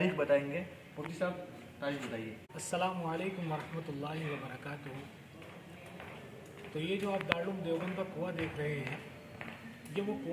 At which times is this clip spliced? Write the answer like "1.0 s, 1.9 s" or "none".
2.5 s